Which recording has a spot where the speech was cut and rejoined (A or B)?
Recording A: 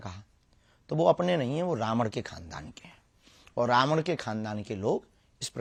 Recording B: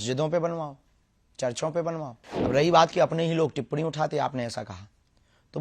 B